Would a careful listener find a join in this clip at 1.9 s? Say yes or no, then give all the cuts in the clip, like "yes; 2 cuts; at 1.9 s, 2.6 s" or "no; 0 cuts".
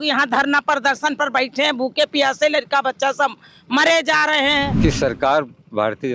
no; 1 cut; at 4.7 s